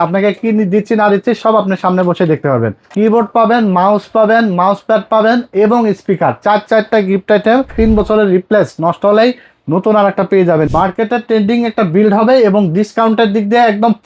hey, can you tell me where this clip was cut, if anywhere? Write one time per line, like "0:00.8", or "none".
0:02.8
0:07.7
0:10.7